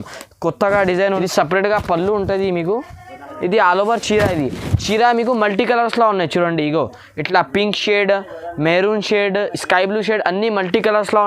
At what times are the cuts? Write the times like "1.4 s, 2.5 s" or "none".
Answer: 1.2 s